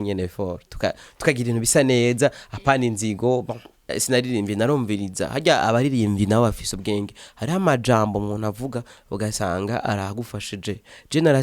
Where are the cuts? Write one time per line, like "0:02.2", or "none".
0:04.0